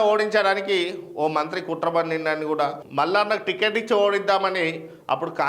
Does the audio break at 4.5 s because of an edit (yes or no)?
no